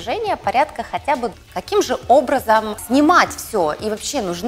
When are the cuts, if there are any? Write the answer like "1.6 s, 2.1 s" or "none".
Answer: 1.4 s, 2.8 s